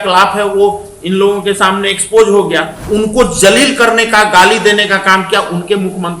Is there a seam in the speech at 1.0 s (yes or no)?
no